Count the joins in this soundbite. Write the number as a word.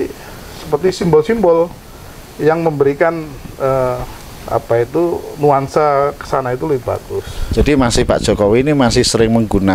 zero